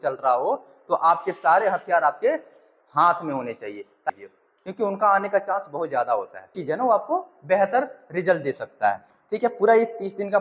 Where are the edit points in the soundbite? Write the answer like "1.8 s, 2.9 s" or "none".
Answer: 4.1 s, 6.6 s, 9.1 s